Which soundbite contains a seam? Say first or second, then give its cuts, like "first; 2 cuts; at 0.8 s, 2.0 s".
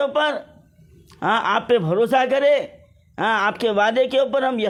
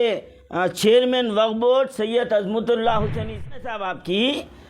second; 1 cut; at 3.5 s